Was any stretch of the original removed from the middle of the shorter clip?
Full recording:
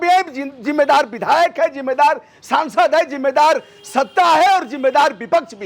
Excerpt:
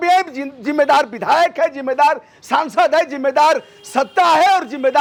no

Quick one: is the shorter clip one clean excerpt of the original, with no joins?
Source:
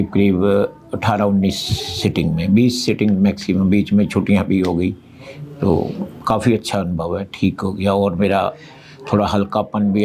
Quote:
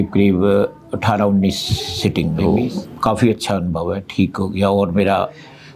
no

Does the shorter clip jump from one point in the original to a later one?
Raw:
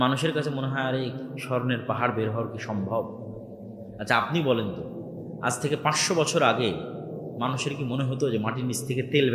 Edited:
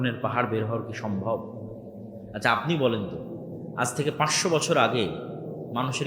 no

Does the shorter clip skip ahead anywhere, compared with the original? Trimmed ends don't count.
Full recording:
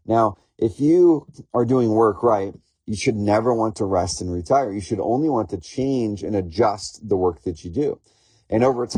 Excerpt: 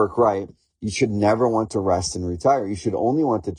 no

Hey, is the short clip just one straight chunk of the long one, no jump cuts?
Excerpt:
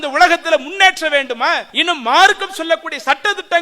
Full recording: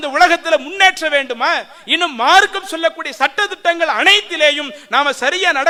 no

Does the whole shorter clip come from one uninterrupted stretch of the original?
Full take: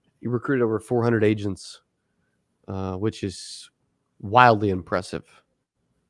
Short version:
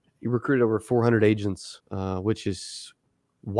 no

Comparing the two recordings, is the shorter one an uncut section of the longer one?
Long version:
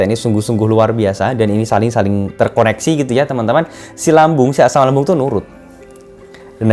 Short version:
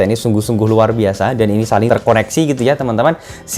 no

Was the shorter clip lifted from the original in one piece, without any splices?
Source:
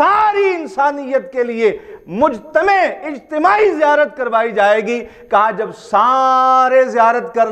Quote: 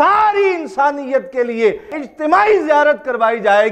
no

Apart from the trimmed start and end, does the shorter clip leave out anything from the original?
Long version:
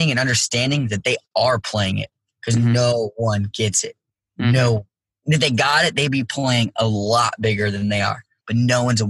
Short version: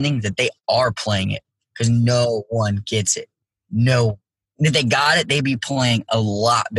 no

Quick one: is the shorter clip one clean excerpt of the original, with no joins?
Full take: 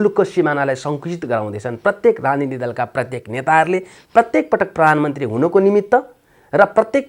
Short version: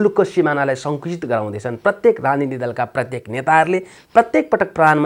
yes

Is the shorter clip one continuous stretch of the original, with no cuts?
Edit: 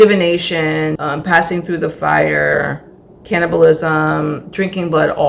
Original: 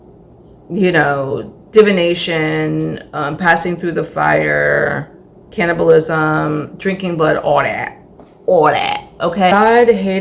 no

